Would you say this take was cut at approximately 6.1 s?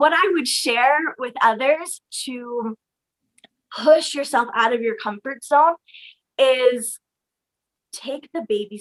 no; 0 cuts

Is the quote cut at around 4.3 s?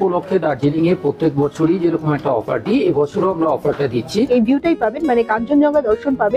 yes; 1 cut; at 4.3 s

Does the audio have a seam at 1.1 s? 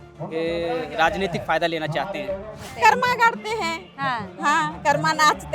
no; 1 cut; at 2.6 s

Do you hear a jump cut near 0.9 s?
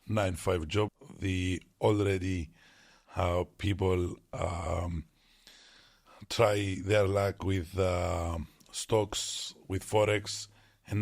yes; 1 cut; at 0.9 s

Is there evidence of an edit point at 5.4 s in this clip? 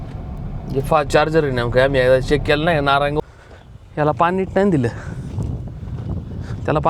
no; 1 cut; at 3.2 s

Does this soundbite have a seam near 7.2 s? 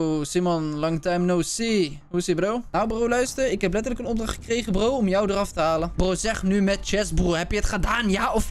no; 2 cuts; at 2.7 s, 5.9 s

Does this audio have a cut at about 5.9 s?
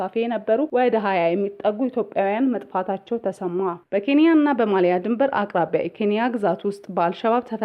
no; 1 cut; at 3.8 s

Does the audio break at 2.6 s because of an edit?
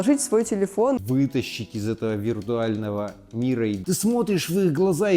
no; 2 cuts; at 1.0 s, 3.8 s

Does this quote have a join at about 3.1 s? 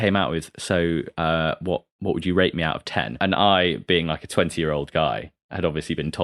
yes; 1 cut; at 3.1 s

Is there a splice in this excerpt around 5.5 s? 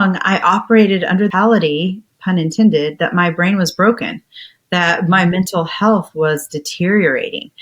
no; 1 cut; at 1.3 s

